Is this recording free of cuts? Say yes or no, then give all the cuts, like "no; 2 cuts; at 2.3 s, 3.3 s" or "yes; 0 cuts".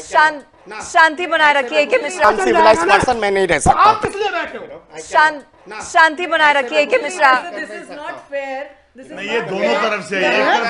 no; 1 cut; at 2.2 s